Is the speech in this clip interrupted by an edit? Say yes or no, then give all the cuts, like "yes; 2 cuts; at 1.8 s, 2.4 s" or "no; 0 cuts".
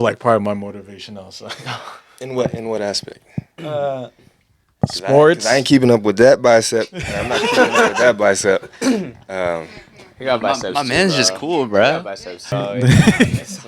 yes; 1 cut; at 12.5 s